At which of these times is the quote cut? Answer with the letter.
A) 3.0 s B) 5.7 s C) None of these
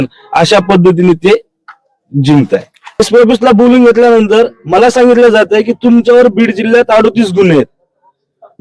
A